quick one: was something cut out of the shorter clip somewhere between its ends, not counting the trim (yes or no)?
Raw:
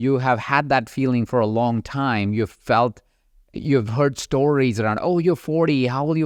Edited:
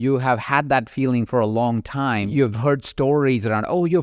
yes